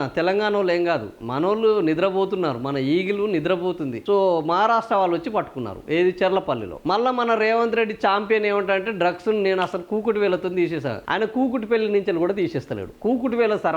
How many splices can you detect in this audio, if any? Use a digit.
1